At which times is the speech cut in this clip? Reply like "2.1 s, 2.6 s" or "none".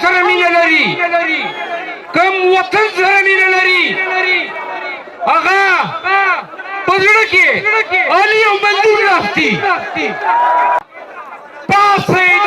10.8 s